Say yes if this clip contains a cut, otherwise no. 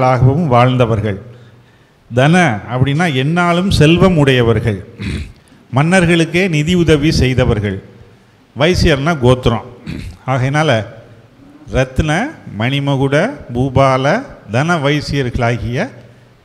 no